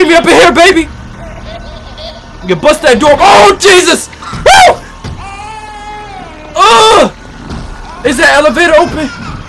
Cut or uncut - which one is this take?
uncut